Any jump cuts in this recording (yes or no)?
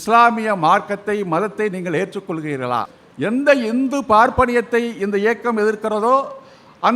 yes